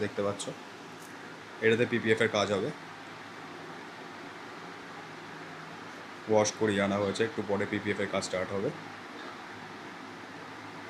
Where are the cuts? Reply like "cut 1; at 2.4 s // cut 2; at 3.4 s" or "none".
none